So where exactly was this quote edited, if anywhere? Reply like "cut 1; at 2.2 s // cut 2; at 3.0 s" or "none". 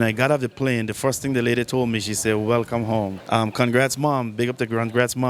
cut 1; at 3.2 s